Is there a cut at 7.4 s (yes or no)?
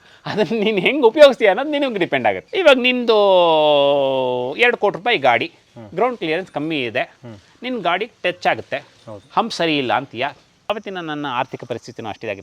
no